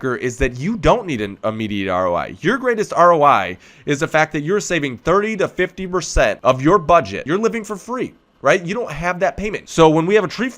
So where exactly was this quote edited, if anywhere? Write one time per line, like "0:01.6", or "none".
0:06.4
0:07.2
0:09.5